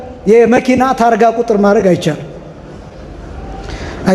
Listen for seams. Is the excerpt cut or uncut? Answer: uncut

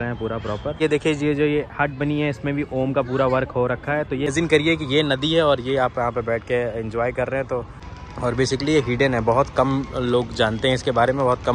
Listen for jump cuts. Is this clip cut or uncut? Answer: cut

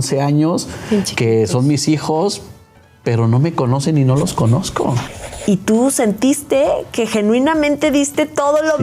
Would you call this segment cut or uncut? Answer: cut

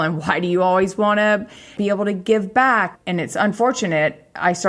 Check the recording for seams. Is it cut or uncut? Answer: cut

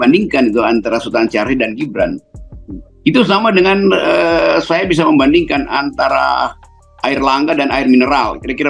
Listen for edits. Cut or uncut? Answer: uncut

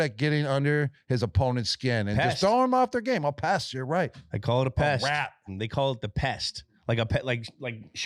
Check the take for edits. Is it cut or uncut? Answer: uncut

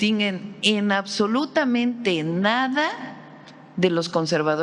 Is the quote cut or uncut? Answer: uncut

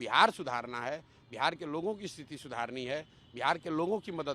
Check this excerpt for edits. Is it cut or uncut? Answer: uncut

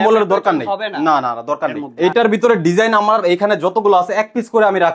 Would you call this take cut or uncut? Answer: cut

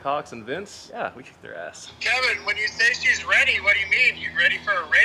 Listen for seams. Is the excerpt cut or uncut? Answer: cut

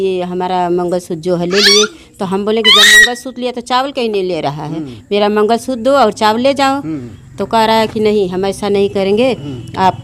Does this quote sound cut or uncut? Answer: uncut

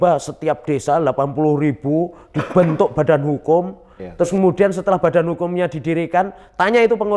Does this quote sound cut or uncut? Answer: uncut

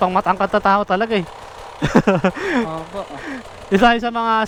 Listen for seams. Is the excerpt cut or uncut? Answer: uncut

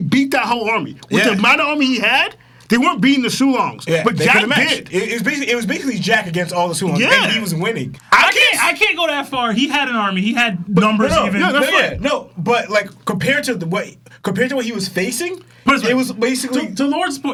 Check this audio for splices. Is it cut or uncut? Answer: uncut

